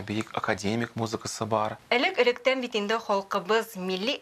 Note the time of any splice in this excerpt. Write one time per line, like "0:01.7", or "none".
0:01.8